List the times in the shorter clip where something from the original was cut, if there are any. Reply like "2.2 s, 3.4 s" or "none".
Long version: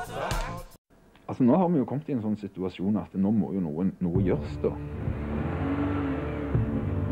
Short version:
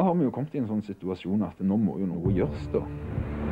2.2 s